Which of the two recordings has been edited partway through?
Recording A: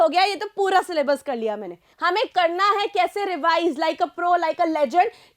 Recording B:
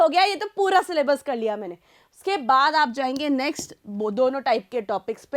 A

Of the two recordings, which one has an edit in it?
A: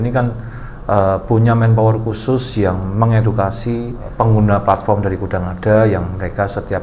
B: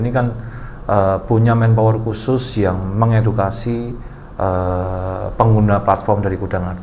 A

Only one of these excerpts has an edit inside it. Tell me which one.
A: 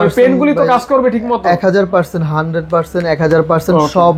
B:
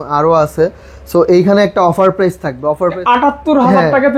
B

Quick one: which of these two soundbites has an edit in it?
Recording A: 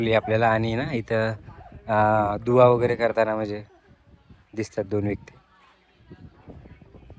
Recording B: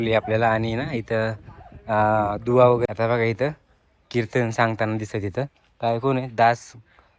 B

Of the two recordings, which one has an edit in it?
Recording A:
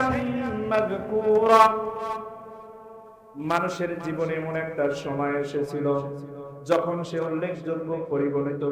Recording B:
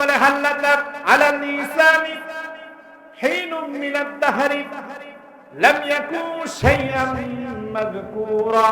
B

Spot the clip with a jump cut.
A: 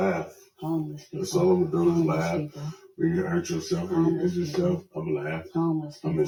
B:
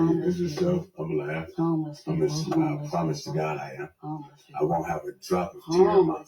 B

